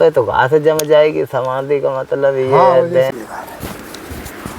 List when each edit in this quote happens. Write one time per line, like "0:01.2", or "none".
0:03.1